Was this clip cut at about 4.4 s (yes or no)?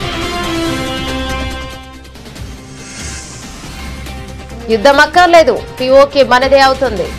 yes